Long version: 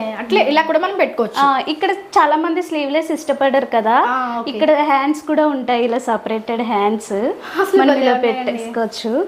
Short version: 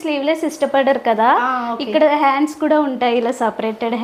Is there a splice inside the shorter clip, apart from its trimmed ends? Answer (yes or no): no